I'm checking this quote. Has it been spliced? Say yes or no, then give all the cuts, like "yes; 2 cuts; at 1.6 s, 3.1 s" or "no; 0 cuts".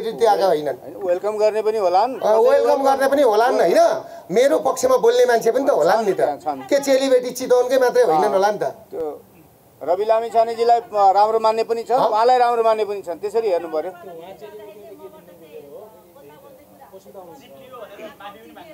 no; 0 cuts